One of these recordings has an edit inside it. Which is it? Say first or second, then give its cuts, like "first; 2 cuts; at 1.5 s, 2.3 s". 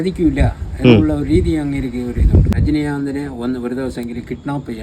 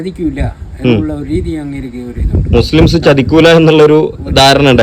first; 1 cut; at 2.5 s